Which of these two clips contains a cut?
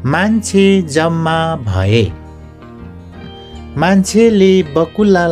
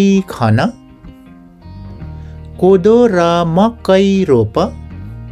second; 2 cuts; at 0.7 s, 2.2 s

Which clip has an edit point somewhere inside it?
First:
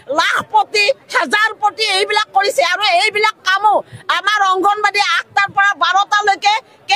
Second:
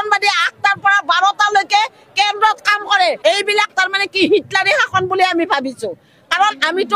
second; 1 cut; at 3.2 s

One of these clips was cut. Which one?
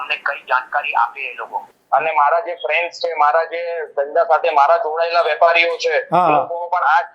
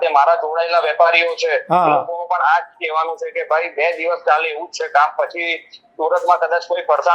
first; 1 cut; at 1.7 s

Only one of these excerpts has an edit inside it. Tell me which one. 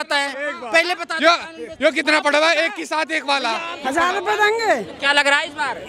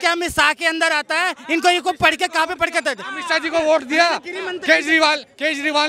first; 1 cut; at 3.9 s

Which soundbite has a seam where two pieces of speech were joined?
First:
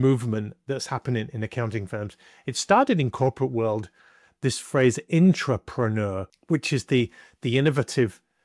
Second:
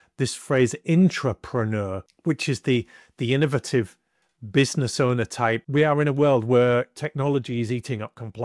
second; 1 cut; at 5.6 s

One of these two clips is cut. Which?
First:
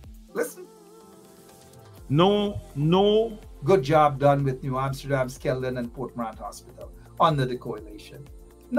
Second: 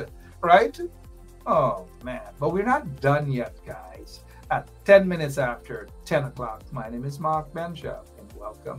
first; 1 cut; at 3.5 s

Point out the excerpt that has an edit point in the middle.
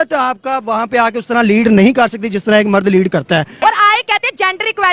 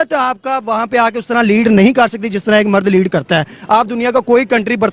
first; 1 cut; at 3.5 s

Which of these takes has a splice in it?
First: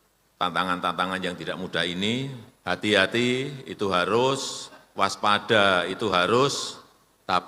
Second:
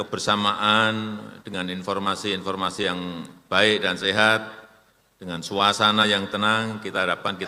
first; 1 cut; at 2.5 s

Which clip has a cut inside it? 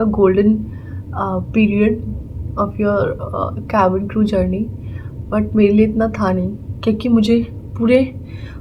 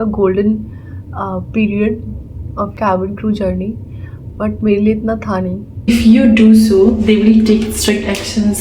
second; 2 cuts; at 2.7 s, 5.9 s

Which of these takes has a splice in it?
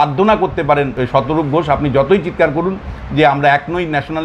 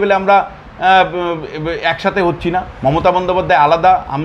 first; 1 cut; at 1.0 s

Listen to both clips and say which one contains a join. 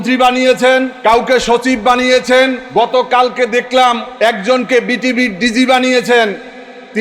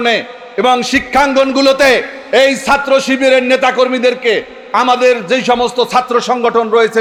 first; 3 cuts; at 0.9 s, 2.6 s, 4.1 s

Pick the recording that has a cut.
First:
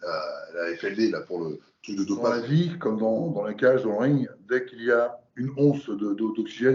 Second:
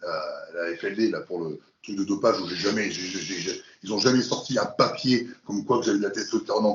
first; 1 cut; at 2.3 s

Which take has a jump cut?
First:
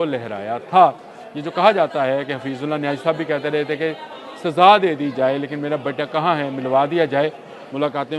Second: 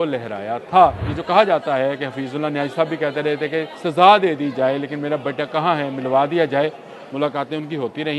second; 2 cuts; at 1.1 s, 3.7 s

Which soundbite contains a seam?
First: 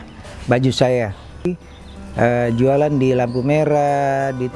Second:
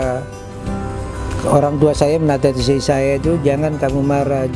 first; 1 cut; at 1.5 s

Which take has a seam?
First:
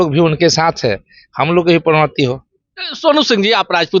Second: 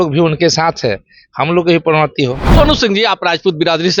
second; 1 cut; at 2.4 s

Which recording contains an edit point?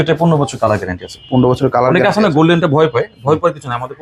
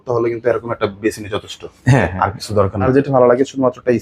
second; 1 cut; at 2.8 s

